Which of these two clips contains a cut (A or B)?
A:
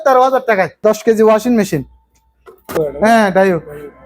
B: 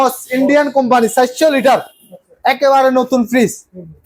A